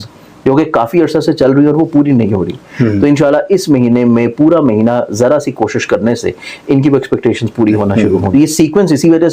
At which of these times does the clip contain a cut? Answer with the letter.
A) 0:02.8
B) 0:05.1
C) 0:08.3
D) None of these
C